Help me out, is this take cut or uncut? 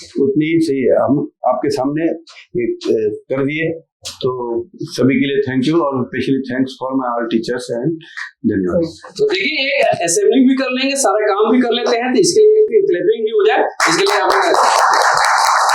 cut